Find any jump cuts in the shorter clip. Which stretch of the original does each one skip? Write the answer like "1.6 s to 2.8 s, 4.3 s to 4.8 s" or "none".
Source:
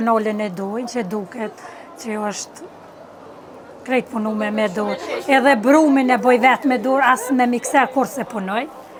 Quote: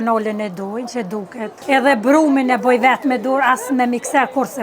1.6 s to 5.2 s